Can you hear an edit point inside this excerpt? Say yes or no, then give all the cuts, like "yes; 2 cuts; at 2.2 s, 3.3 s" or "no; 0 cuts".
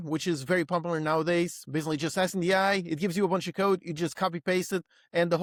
no; 0 cuts